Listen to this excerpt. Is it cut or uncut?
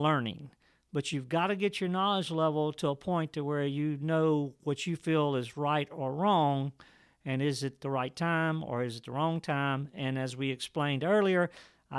uncut